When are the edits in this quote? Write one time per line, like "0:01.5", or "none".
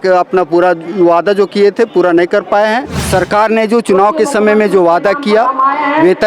0:02.9